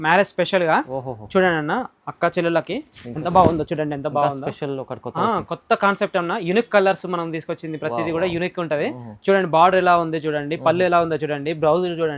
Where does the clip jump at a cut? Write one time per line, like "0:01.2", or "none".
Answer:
none